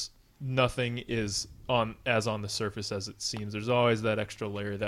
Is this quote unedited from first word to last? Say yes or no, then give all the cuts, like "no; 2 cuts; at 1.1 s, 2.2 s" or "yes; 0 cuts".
yes; 0 cuts